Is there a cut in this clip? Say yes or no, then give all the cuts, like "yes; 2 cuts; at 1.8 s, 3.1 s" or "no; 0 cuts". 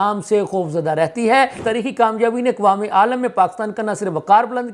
yes; 1 cut; at 1.6 s